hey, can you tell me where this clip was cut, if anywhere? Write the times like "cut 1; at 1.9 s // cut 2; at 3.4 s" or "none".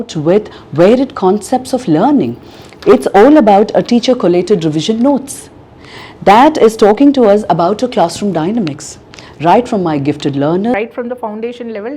cut 1; at 10.7 s